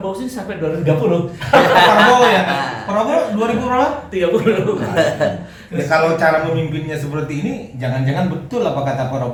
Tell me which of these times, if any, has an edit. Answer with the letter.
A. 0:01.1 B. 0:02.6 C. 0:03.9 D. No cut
D